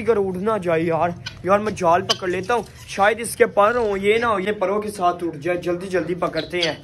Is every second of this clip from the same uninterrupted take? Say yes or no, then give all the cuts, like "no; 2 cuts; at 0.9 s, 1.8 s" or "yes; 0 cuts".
yes; 0 cuts